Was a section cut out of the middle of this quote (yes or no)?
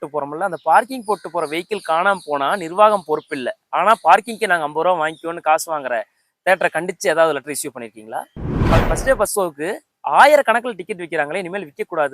yes